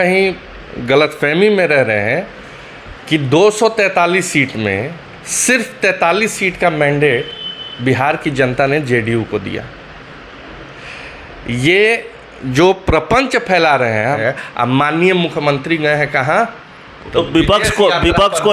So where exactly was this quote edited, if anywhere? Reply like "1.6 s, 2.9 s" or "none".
14.2 s